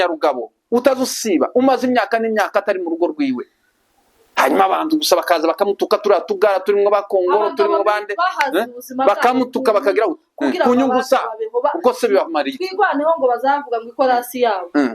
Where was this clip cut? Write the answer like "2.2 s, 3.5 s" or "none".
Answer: none